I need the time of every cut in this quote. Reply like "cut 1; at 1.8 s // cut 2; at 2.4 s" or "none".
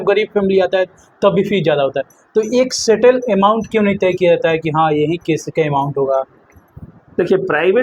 none